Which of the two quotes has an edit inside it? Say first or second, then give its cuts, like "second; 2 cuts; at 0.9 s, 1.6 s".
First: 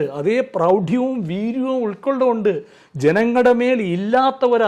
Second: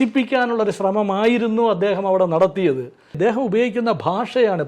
second; 1 cut; at 3.1 s